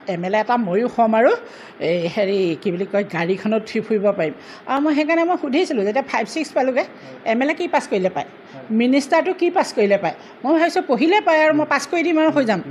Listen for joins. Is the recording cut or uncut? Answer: uncut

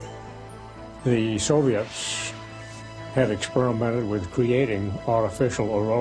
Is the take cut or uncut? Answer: uncut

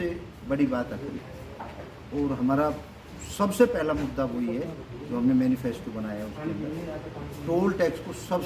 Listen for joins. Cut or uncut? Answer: uncut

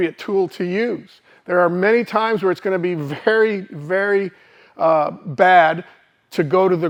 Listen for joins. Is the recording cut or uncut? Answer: uncut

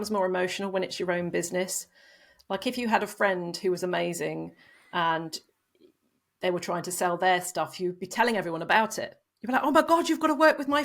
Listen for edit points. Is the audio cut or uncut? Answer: uncut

